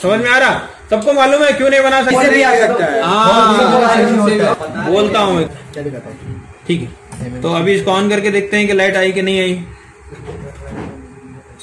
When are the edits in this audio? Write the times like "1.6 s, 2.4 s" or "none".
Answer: 4.6 s